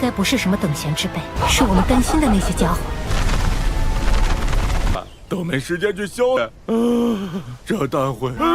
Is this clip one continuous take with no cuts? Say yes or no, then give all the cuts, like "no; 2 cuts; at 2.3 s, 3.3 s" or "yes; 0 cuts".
no; 1 cut; at 4.9 s